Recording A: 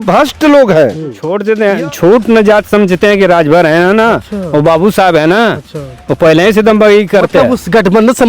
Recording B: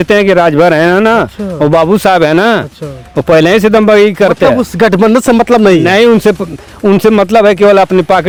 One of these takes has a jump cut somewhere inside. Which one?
A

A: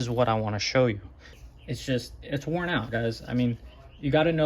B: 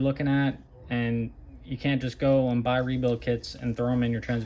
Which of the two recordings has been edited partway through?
A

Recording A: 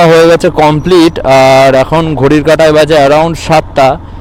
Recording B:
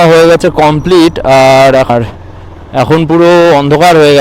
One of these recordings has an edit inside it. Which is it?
B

